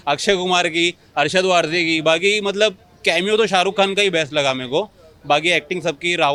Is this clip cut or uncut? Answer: uncut